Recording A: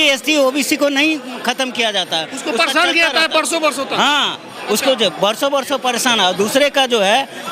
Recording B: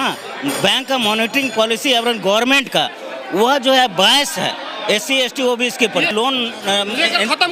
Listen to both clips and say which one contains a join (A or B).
B